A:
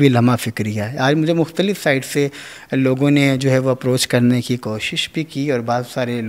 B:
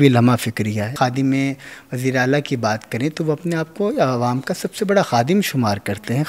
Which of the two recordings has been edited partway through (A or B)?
B